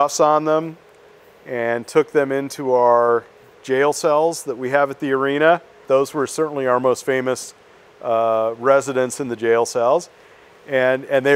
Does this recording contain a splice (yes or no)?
yes